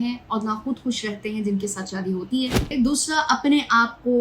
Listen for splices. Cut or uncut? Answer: cut